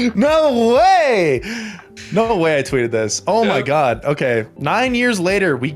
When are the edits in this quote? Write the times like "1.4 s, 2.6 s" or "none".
4.5 s

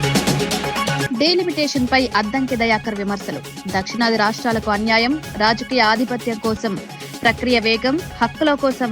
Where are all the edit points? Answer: 1.0 s

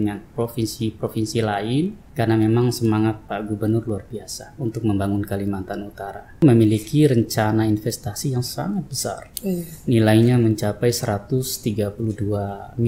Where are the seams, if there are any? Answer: 2.0 s, 6.4 s

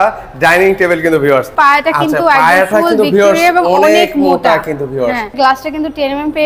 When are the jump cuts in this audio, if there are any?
1.5 s, 5.3 s

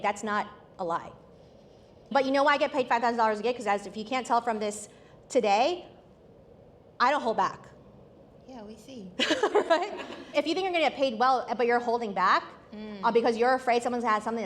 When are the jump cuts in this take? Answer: 2.1 s, 10.3 s

